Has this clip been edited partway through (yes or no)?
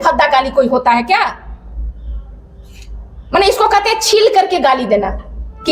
no